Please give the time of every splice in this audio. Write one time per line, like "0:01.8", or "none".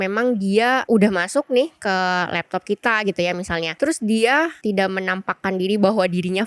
0:00.8
0:03.7
0:04.6